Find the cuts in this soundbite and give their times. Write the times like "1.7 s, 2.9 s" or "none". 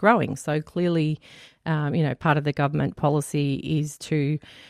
none